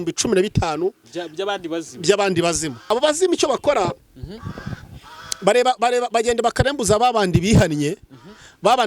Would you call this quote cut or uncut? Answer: cut